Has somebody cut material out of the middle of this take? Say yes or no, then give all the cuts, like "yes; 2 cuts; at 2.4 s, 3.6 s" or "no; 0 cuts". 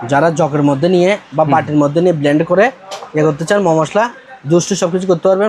no; 0 cuts